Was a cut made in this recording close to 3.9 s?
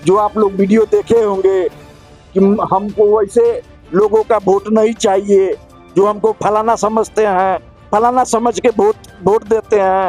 no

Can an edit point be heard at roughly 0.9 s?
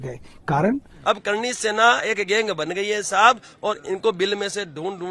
yes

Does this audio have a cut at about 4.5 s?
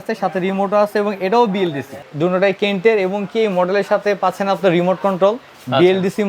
no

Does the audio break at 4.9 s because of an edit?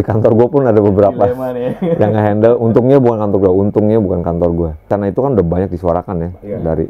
yes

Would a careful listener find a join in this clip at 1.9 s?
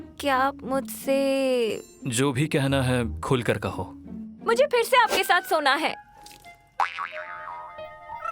yes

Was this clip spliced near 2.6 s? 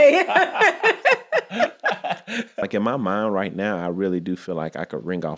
yes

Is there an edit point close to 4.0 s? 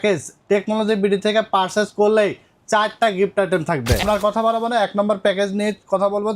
yes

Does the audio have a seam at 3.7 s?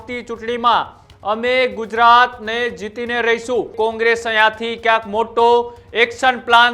yes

